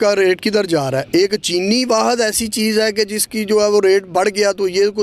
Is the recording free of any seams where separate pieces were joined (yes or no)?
yes